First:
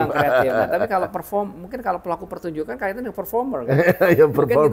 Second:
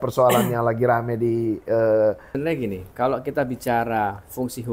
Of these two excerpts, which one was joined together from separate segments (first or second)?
second